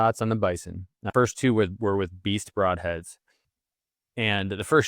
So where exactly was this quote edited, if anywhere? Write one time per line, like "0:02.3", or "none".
0:00.9